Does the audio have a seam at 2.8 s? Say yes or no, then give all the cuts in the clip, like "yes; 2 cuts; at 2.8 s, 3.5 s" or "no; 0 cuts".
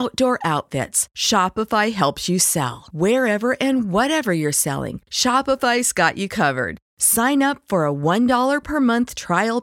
no; 0 cuts